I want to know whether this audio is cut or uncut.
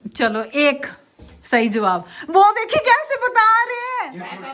uncut